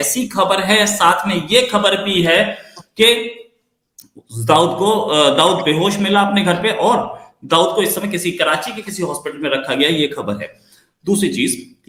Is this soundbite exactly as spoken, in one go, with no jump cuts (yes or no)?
yes